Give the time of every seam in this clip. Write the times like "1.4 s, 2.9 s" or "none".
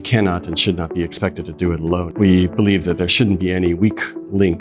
2.1 s